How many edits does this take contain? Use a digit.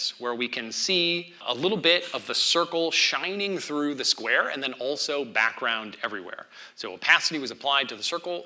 1